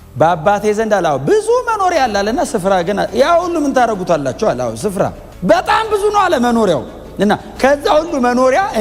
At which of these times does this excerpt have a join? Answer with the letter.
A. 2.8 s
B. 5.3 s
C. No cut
B